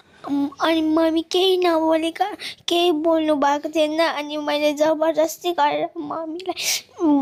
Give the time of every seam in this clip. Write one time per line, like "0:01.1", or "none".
none